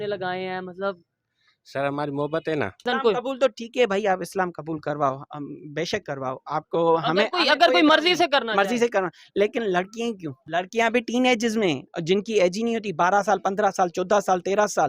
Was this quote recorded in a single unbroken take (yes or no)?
no